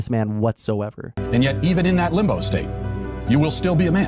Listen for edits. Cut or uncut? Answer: cut